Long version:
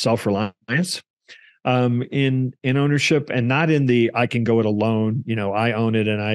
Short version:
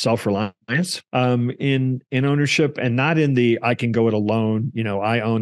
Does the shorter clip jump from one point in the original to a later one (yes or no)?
yes